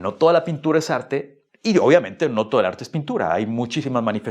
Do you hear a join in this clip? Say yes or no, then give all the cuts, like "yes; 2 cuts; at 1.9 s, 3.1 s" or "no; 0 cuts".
no; 0 cuts